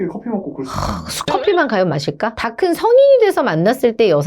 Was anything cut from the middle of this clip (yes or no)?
yes